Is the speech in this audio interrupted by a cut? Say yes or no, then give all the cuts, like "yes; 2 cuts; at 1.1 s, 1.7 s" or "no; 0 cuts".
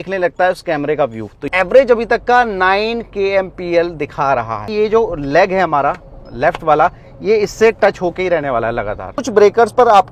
yes; 3 cuts; at 1.5 s, 4.7 s, 9.1 s